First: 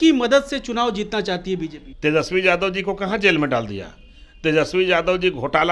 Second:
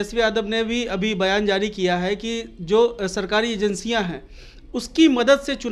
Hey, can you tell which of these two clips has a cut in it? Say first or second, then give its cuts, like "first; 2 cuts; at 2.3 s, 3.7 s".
first; 1 cut; at 1.8 s